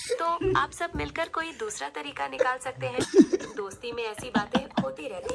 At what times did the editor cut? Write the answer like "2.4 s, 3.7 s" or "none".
none